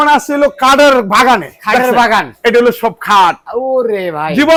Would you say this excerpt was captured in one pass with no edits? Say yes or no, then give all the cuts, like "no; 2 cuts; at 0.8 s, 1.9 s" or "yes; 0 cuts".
yes; 0 cuts